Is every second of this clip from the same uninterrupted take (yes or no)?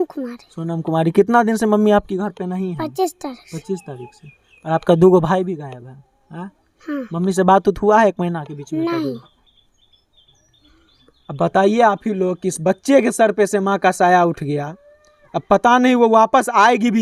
yes